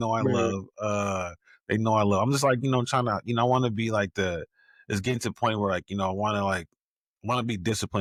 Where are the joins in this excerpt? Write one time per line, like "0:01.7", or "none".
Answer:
none